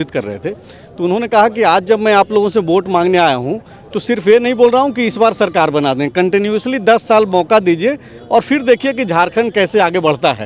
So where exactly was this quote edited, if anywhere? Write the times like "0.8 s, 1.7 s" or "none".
none